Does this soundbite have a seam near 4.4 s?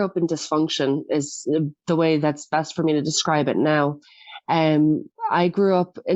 no; 0 cuts

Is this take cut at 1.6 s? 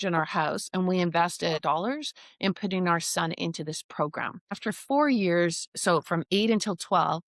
yes; 2 cuts; at 1.6 s, 4.6 s

